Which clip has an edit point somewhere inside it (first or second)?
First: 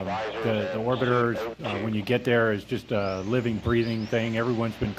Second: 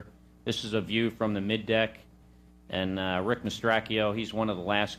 second